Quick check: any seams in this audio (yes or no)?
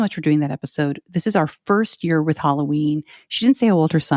no